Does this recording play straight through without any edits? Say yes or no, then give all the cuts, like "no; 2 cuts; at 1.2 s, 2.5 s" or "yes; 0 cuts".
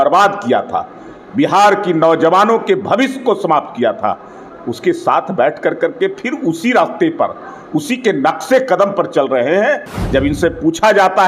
no; 1 cut; at 9.9 s